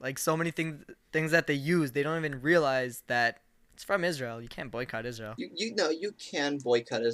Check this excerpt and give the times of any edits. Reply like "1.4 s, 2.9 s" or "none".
5.3 s